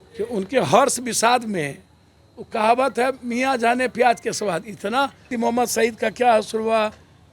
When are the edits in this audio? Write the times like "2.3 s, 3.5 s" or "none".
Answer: 5.2 s